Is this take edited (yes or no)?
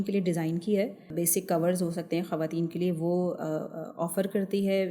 yes